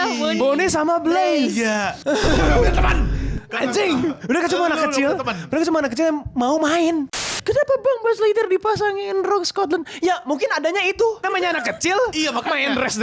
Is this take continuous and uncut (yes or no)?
no